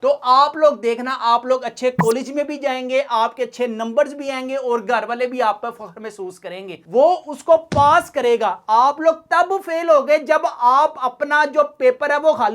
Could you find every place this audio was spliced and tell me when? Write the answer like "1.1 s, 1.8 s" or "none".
6.7 s